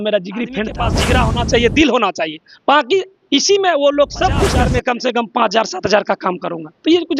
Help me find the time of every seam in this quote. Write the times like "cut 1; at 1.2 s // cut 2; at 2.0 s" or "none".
cut 1; at 0.9 s // cut 2; at 4.6 s

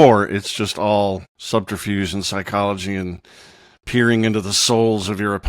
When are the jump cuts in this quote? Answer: cut 1; at 1.3 s

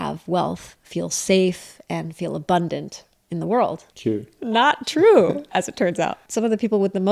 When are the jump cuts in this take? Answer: cut 1; at 3.9 s // cut 2; at 6.2 s

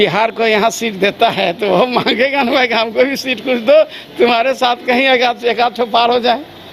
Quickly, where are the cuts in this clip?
none

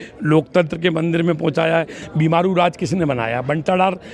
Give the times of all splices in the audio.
cut 1; at 2.0 s

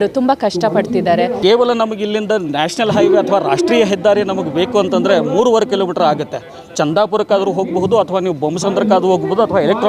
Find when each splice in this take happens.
cut 1; at 1.4 s

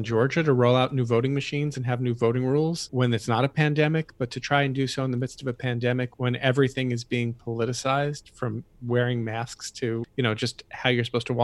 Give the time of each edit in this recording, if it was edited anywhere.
cut 1; at 2.8 s // cut 2; at 6.1 s // cut 3; at 8.7 s // cut 4; at 10.1 s

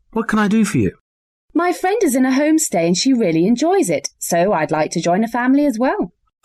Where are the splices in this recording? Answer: cut 1; at 3.0 s

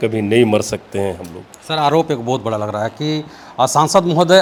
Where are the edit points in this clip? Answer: none

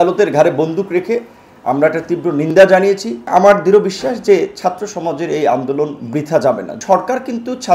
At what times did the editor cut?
cut 1; at 3.3 s // cut 2; at 6.8 s

